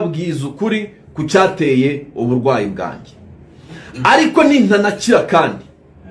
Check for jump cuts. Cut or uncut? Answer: uncut